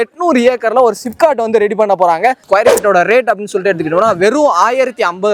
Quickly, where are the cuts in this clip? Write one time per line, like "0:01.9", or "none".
0:02.4